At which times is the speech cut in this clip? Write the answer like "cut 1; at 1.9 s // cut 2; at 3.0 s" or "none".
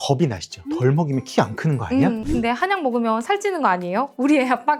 cut 1; at 2.2 s